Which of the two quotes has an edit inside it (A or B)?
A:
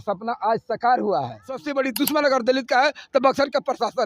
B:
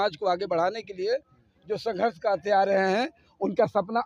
A